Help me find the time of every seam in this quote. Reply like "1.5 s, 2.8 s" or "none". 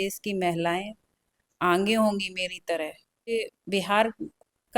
3.3 s